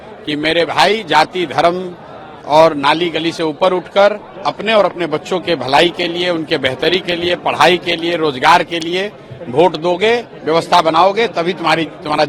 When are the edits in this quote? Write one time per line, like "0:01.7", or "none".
none